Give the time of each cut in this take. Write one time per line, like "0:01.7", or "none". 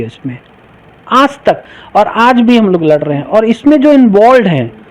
0:01.8